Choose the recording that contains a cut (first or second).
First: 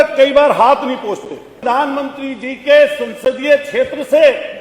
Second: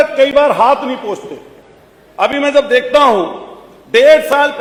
first